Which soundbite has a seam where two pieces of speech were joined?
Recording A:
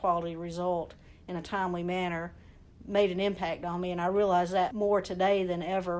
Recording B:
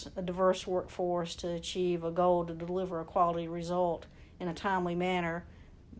A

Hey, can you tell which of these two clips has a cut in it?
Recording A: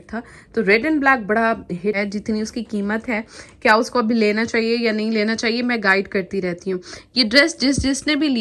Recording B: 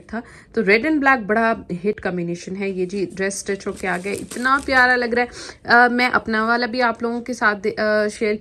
A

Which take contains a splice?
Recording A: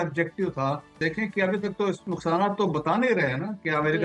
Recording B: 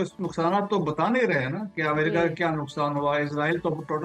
A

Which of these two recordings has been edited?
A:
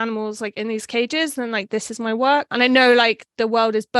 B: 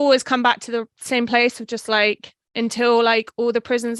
A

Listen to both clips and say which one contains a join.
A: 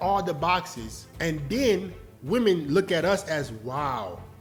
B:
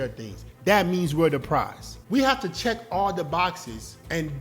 B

